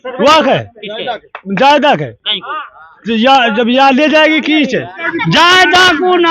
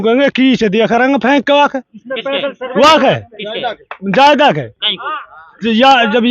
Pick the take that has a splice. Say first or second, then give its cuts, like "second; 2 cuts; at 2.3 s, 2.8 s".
first; 1 cut; at 5.1 s